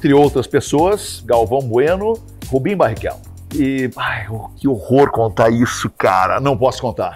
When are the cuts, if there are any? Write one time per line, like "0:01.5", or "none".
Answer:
0:01.1
0:02.3